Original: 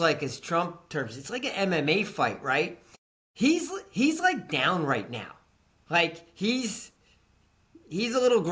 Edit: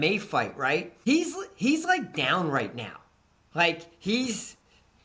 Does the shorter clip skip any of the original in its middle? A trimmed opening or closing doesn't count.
yes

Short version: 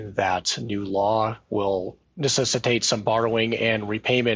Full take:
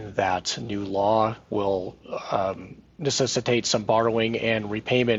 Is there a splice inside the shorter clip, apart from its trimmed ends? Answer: yes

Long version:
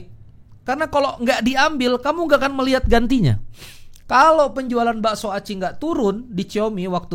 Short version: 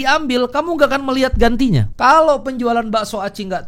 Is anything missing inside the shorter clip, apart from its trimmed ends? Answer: yes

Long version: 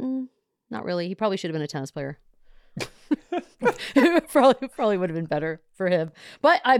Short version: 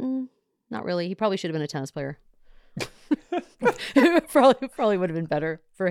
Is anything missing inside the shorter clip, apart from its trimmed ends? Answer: no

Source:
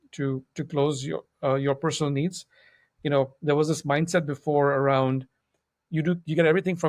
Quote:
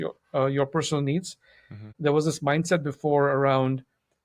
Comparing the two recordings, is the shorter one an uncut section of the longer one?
no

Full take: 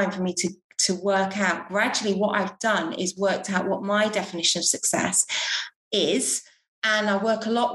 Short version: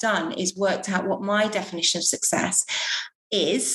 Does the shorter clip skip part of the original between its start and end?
no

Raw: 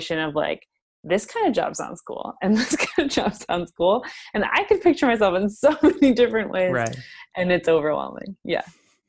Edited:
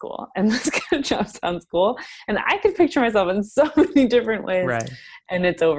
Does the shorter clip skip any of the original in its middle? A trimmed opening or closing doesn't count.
no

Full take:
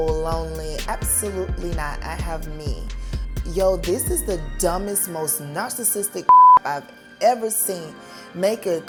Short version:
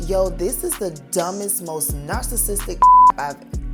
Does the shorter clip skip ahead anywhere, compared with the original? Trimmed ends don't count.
no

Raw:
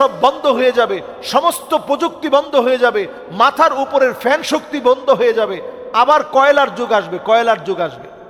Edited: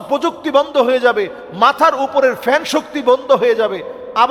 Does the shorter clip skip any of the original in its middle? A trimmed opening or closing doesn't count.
no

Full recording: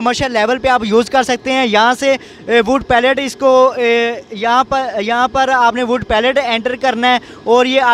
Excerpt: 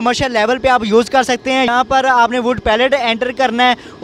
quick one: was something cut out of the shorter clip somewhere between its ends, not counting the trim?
yes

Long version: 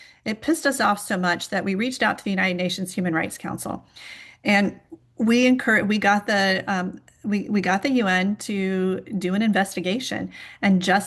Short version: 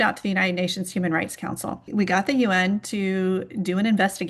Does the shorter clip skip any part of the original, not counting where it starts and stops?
yes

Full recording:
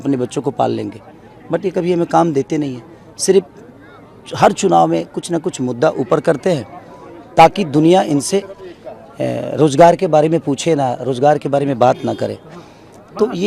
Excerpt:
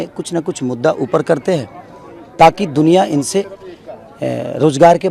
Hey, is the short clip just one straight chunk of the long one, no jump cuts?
yes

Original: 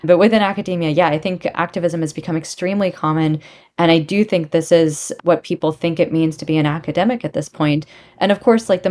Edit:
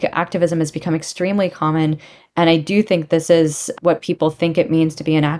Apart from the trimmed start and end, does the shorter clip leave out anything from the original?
no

